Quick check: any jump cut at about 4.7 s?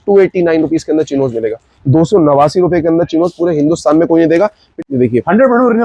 yes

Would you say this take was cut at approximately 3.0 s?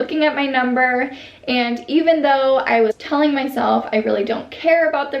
yes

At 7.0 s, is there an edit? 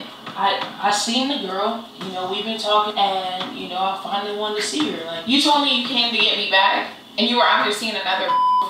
no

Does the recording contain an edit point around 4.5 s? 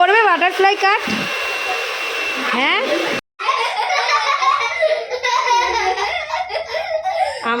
no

